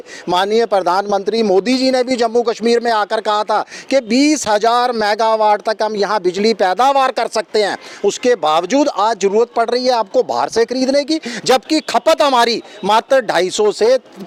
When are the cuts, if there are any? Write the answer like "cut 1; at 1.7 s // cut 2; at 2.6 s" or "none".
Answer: none